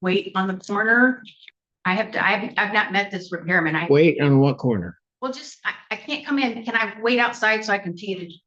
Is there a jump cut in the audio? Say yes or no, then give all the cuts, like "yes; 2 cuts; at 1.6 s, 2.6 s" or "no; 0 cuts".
no; 0 cuts